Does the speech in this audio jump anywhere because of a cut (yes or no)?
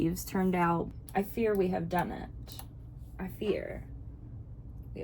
yes